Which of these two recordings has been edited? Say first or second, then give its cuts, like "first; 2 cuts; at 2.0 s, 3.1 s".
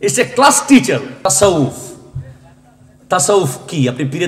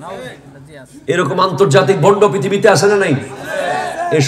first; 1 cut; at 1.3 s